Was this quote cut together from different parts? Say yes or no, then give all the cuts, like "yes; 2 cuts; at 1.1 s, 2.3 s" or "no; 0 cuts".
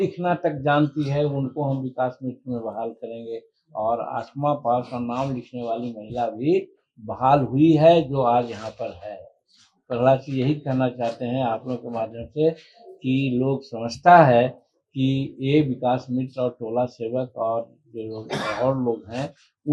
no; 0 cuts